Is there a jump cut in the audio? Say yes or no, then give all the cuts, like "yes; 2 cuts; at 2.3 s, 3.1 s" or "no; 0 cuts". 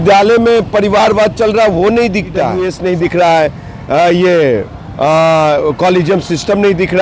yes; 1 cut; at 2.6 s